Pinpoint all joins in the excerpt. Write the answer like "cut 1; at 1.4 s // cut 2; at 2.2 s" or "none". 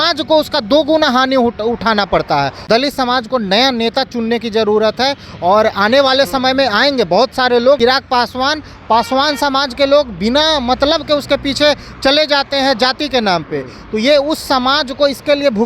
cut 1; at 2.6 s // cut 2; at 7.8 s